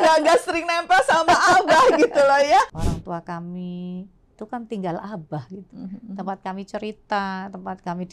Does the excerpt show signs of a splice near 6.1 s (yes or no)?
no